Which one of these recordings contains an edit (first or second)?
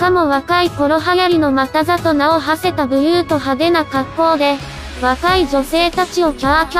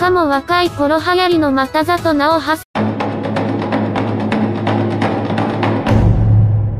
first